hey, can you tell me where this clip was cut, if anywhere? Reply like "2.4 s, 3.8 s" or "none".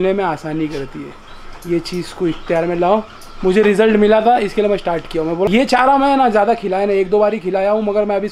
5.5 s